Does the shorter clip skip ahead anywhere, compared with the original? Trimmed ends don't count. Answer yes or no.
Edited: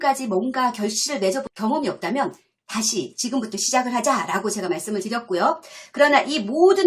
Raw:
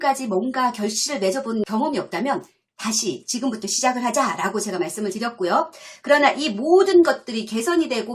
yes